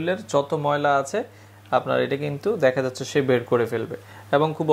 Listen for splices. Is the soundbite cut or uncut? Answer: uncut